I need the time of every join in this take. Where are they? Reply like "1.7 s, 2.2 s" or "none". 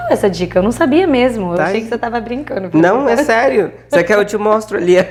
none